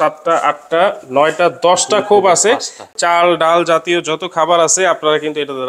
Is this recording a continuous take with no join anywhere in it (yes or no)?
no